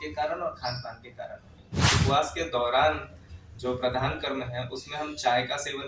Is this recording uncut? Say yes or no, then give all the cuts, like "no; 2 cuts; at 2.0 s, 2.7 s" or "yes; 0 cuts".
no; 1 cut; at 1.9 s